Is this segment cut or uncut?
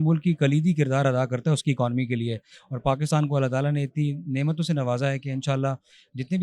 uncut